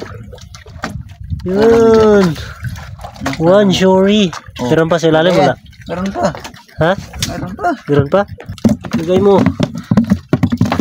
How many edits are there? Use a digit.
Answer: 0